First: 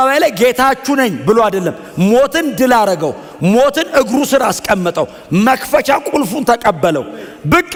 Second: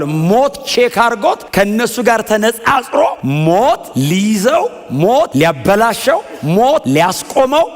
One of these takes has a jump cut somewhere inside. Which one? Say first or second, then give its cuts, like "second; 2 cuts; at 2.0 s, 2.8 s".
second; 5 cuts; at 1.4 s, 3.2 s, 3.9 s, 5.3 s, 6.8 s